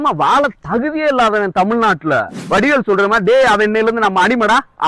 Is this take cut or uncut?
cut